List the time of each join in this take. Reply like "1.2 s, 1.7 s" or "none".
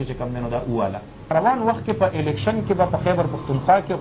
1.3 s